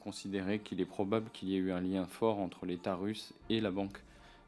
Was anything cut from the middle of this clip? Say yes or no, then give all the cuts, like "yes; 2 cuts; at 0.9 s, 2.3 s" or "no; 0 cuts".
no; 0 cuts